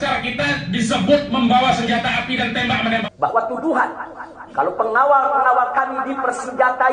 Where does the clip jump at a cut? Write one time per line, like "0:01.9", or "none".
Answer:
0:03.1